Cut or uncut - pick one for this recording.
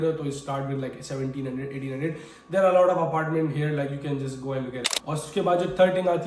cut